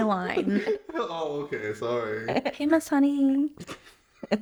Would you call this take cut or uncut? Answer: uncut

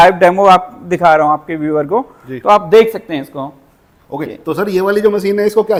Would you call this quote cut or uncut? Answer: uncut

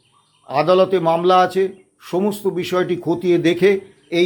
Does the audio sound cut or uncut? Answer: uncut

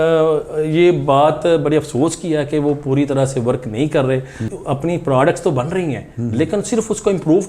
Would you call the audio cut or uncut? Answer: cut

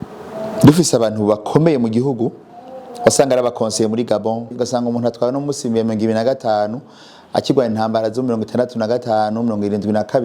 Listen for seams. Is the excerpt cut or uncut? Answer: cut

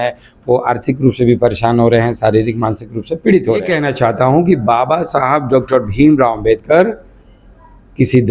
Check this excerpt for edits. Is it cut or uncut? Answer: cut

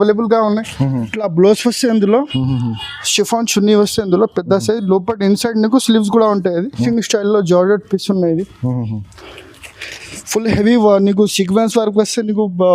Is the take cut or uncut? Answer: cut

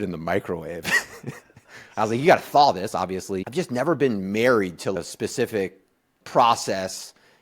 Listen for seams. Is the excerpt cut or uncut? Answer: cut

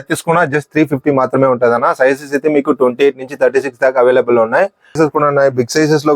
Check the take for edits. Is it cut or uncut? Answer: cut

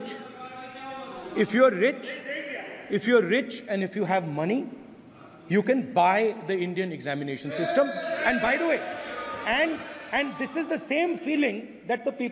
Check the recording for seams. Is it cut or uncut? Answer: uncut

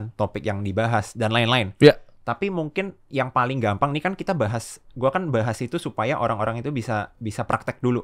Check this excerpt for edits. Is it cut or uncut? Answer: uncut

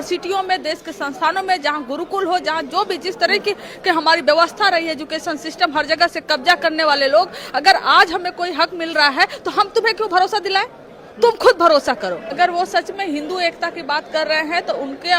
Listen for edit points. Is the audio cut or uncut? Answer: cut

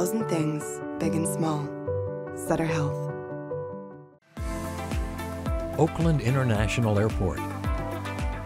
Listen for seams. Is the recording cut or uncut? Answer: cut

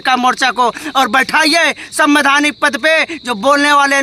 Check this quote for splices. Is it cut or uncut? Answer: uncut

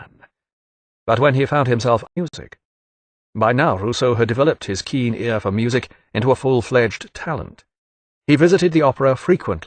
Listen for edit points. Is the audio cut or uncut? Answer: uncut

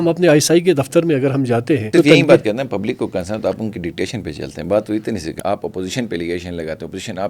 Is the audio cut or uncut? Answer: cut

